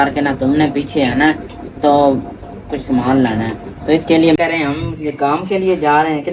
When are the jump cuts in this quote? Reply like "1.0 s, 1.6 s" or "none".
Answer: 4.4 s